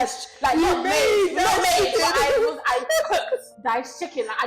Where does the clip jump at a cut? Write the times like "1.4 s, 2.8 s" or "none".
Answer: 3.5 s